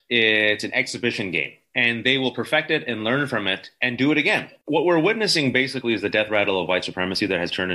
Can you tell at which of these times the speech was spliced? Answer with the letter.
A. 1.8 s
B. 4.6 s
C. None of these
B